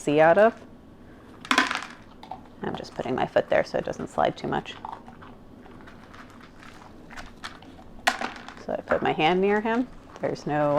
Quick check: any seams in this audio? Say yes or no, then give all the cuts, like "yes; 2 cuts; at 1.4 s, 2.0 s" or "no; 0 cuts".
yes; 1 cut; at 6.6 s